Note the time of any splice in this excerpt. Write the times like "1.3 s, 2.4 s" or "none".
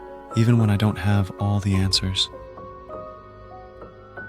2.1 s

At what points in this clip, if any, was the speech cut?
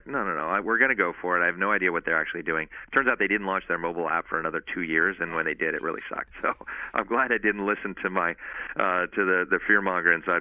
6.3 s

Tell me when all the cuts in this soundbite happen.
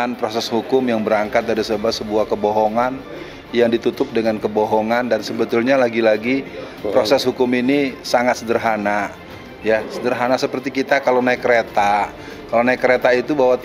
none

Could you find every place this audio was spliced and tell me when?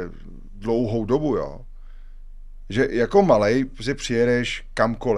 none

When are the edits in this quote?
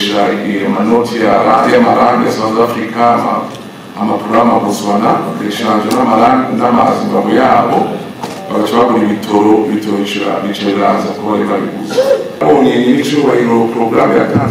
12.4 s

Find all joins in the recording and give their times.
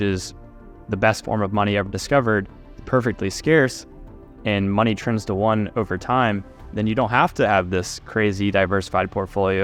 none

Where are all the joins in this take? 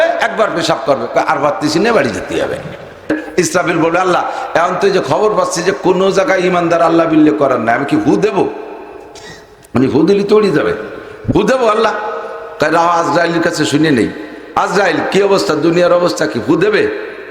3.1 s

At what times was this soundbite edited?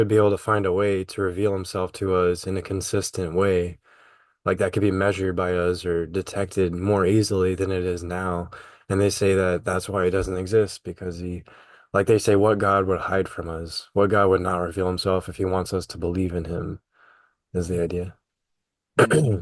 none

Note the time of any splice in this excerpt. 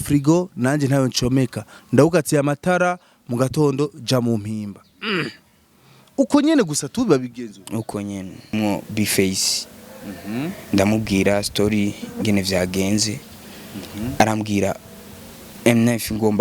8.5 s

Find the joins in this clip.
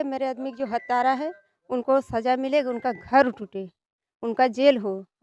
none

